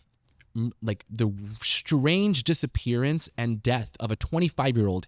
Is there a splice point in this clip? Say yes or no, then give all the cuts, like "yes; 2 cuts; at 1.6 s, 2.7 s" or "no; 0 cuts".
no; 0 cuts